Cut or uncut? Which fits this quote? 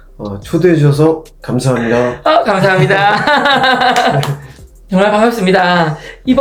uncut